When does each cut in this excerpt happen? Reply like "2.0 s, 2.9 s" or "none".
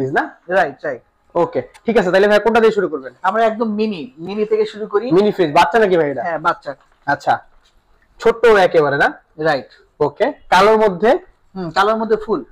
none